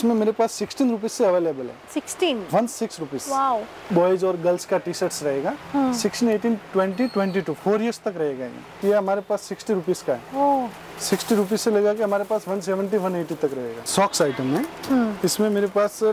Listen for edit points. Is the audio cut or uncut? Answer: cut